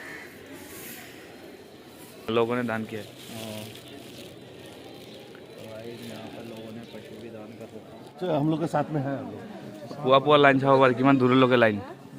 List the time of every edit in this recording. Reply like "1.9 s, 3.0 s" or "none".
none